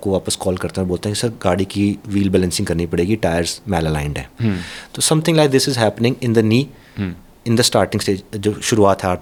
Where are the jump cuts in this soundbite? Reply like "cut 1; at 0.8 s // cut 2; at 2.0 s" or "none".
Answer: none